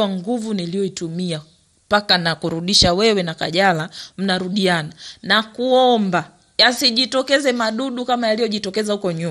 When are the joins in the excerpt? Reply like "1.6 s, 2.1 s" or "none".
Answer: none